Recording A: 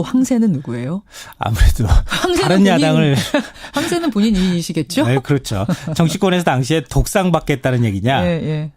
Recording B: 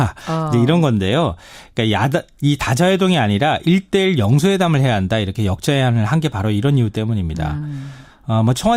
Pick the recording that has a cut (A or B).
A